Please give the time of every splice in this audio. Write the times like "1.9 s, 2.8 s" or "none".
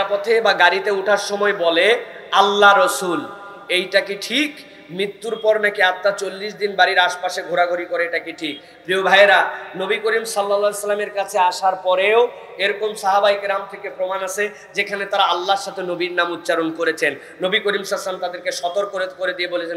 none

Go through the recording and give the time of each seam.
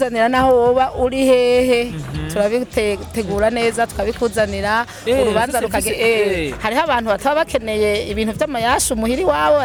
none

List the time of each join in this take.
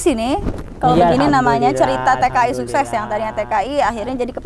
none

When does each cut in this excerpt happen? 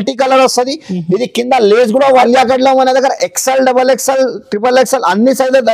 2.2 s

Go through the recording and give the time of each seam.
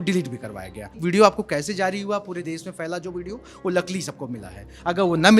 1.0 s

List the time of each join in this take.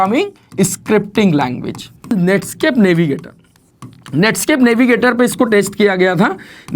2.1 s

